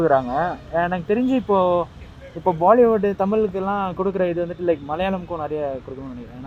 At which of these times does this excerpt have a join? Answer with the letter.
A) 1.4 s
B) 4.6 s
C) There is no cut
C